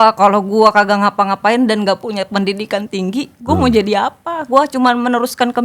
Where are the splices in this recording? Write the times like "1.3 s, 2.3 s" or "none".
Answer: none